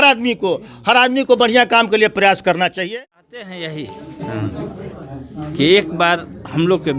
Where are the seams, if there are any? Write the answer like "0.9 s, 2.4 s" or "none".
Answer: 2.9 s